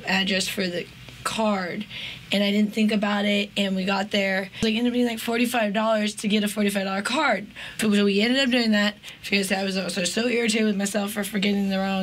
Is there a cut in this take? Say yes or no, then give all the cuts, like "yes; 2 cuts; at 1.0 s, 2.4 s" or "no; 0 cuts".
yes; 2 cuts; at 4.6 s, 7.6 s